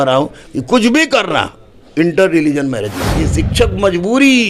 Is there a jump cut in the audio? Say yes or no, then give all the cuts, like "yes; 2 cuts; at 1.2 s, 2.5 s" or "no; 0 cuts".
yes; 1 cut; at 3.2 s